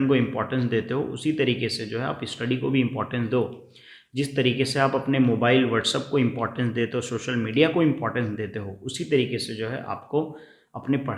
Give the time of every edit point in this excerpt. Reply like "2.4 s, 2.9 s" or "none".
none